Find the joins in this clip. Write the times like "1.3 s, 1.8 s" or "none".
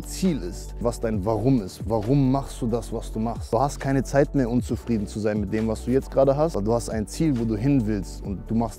0.8 s, 3.4 s, 6.6 s